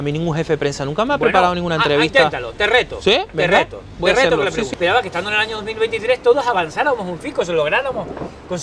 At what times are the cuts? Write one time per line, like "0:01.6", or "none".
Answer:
0:04.7